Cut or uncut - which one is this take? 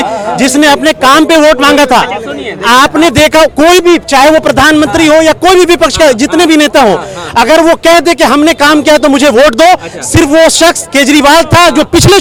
uncut